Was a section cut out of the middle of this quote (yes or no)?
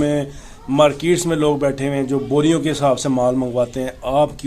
no